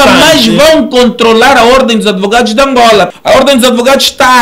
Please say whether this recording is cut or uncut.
cut